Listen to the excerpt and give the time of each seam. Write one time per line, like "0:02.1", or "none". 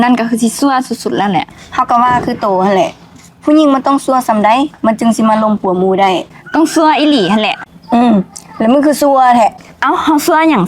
0:07.7